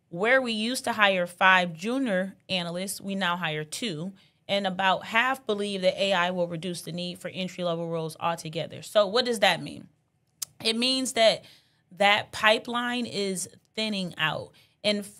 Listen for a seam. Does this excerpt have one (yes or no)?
no